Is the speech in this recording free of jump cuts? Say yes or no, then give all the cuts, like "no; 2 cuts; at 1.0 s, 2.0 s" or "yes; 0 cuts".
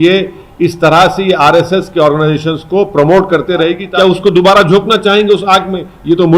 no; 1 cut; at 3.8 s